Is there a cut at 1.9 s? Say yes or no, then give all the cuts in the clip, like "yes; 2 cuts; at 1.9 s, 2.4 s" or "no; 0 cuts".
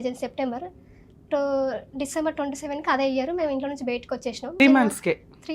no; 1 cut; at 4.6 s